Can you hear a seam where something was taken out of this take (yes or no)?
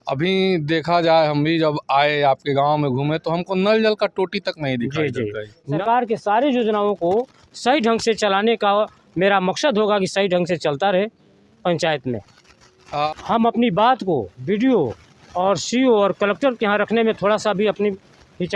yes